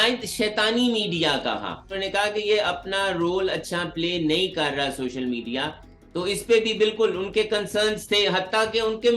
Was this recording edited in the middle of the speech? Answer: yes; 1 cut; at 2.0 s

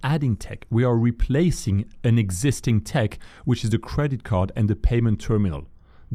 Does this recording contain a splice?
no; 0 cuts

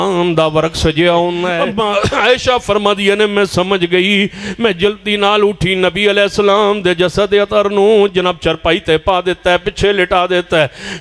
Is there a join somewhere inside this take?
yes; 1 cut; at 1.6 s

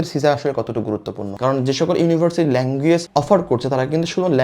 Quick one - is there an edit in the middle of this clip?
yes; 1 cut; at 1.4 s

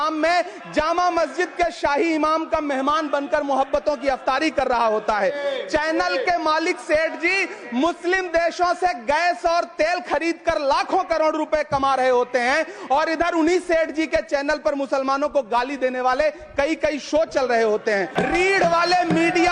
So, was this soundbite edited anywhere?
yes; 1 cut; at 18.1 s

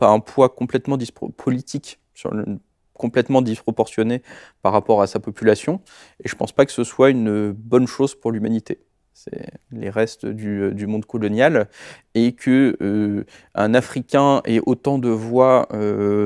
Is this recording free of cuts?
yes; 0 cuts

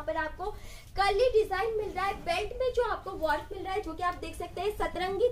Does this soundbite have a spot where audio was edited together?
no; 0 cuts

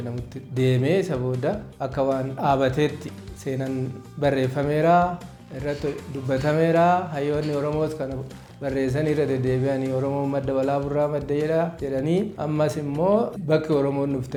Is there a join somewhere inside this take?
no; 0 cuts

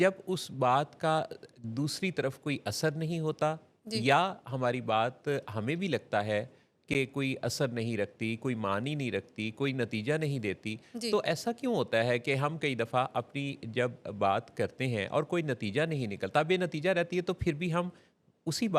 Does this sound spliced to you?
no; 0 cuts

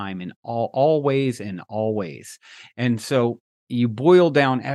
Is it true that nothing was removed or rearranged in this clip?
no; 1 cut; at 3.5 s

